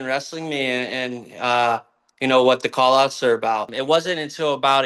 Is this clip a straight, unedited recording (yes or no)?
no